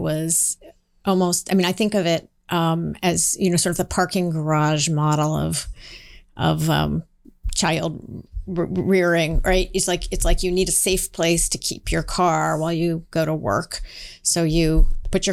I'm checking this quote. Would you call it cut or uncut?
uncut